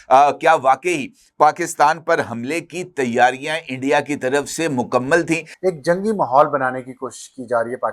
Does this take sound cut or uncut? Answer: cut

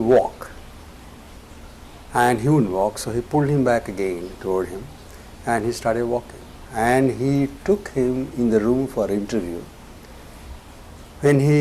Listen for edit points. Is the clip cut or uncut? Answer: uncut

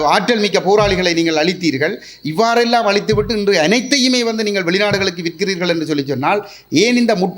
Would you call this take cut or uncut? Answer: uncut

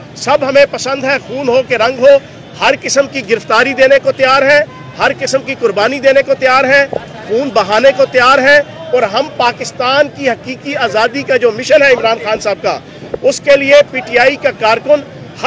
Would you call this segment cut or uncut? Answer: uncut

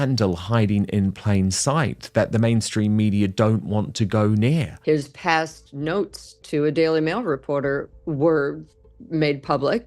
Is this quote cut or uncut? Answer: cut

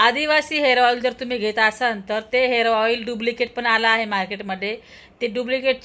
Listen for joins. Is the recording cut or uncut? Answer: uncut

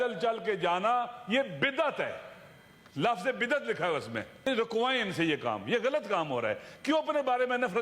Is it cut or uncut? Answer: cut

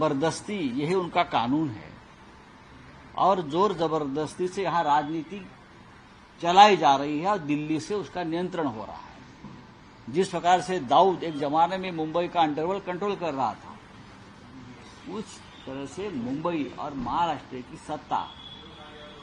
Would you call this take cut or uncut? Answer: uncut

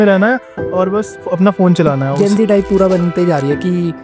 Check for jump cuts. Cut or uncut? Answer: cut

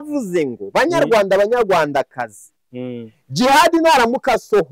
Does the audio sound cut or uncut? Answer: uncut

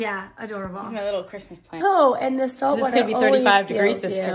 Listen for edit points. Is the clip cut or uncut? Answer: cut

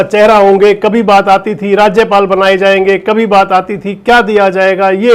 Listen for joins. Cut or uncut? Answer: uncut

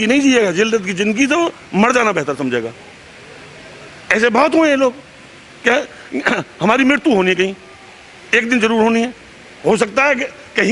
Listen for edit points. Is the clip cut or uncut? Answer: cut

